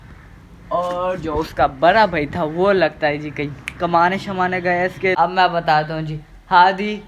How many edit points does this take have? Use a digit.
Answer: 1